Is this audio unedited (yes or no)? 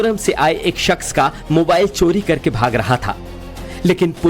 no